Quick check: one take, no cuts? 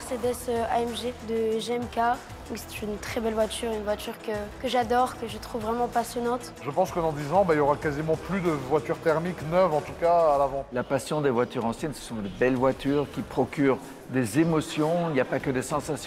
no; 4 cuts; at 1.1 s, 4.5 s, 6.6 s, 10.7 s

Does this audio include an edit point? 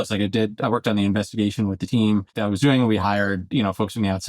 yes; 1 cut; at 2.4 s

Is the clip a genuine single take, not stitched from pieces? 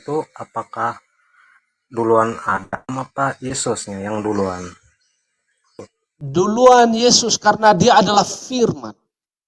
yes; 0 cuts

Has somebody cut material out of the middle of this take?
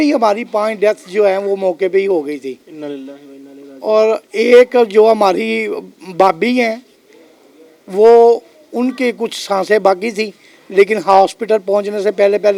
no; 0 cuts

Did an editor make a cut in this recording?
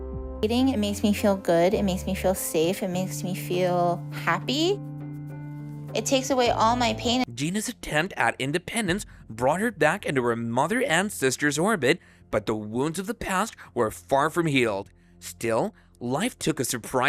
no; 0 cuts

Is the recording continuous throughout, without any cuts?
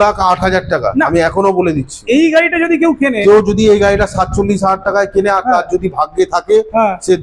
yes; 0 cuts

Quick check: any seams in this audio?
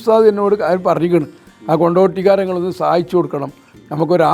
no; 0 cuts

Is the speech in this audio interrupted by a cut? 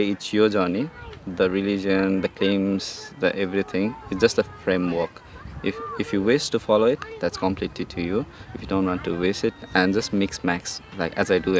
no; 0 cuts

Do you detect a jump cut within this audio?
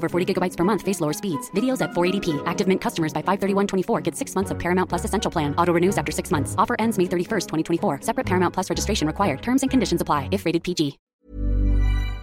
yes; 1 cut; at 11.0 s

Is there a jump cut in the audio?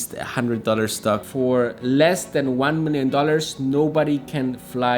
yes; 1 cut; at 1.3 s

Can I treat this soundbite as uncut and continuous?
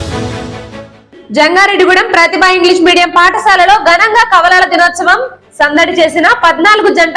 no; 1 cut; at 0.9 s

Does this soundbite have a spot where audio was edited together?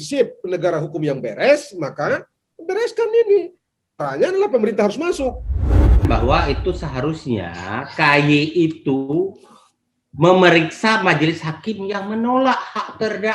yes; 1 cut; at 5.7 s

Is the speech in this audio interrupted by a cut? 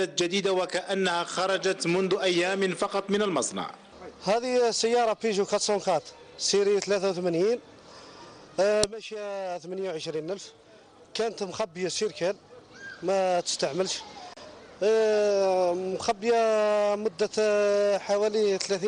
yes; 1 cut; at 2.1 s

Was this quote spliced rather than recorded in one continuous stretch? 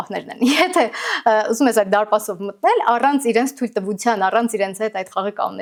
no; 0 cuts

